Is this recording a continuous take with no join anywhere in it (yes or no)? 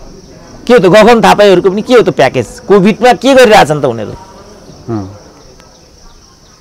yes